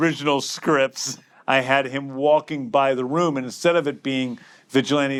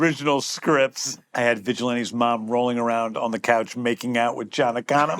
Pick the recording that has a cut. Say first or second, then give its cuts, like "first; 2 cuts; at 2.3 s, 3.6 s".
second; 1 cut; at 1.2 s